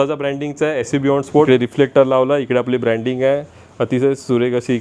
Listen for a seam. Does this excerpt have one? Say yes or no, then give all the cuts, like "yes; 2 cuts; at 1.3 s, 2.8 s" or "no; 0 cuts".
yes; 1 cut; at 1.5 s